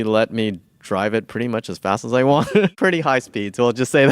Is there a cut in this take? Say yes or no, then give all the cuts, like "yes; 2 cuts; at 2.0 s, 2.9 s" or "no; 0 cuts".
yes; 1 cut; at 2.7 s